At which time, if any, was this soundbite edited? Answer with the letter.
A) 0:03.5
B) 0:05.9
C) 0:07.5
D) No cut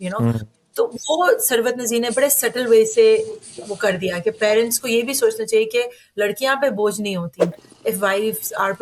C